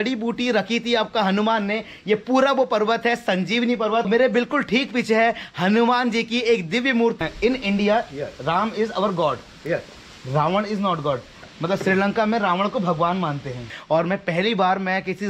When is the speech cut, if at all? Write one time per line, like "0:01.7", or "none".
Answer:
0:04.1
0:07.2
0:11.4
0:13.8